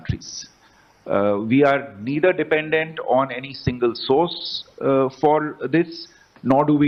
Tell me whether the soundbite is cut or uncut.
uncut